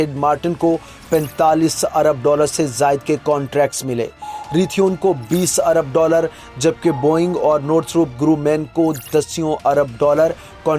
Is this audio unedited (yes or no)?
yes